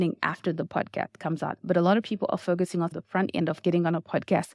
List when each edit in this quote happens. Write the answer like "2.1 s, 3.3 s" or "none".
2.9 s